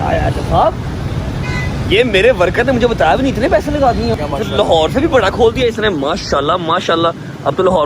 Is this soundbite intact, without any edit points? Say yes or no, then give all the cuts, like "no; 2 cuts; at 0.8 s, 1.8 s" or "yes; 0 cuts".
no; 1 cut; at 4.2 s